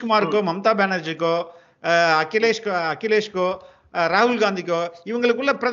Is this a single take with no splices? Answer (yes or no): yes